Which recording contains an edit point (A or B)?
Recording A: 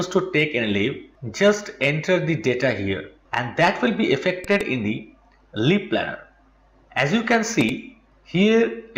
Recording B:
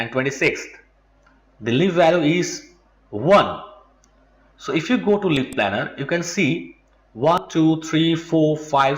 B